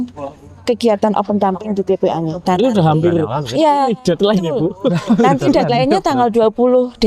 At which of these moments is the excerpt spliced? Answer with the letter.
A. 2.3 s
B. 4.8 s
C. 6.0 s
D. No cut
A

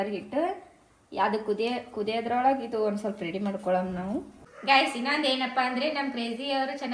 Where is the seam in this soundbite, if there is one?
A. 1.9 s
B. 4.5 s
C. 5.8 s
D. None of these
B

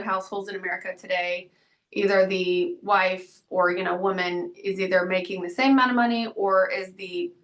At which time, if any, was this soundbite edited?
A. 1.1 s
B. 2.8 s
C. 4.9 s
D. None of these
D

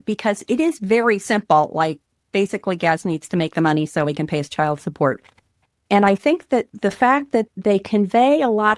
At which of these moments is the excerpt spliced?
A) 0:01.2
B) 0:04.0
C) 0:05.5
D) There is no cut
D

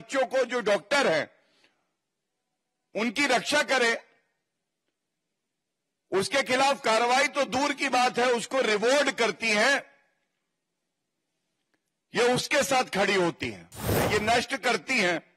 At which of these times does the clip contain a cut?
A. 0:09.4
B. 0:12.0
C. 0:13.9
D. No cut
C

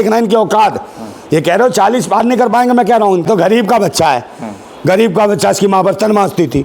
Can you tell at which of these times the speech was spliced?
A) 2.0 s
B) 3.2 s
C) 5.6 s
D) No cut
B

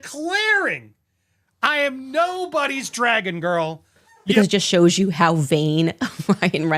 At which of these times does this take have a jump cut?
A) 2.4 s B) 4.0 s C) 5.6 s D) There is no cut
B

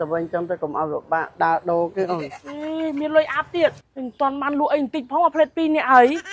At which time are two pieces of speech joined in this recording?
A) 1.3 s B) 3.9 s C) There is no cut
B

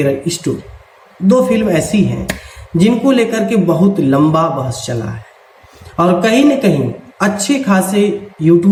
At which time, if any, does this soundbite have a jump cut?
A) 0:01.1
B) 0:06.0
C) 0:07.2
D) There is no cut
D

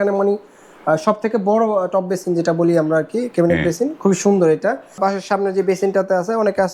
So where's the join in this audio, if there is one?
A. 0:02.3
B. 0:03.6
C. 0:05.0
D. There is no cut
C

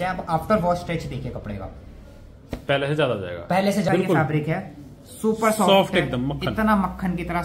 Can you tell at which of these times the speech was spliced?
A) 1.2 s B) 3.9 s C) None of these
B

